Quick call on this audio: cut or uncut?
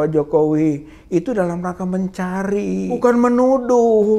cut